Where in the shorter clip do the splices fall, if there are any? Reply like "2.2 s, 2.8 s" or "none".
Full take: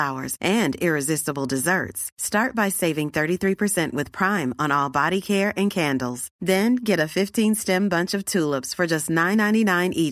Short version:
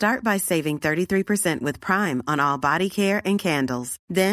none